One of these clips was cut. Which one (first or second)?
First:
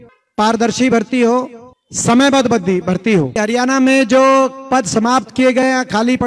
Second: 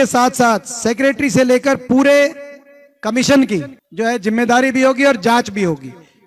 first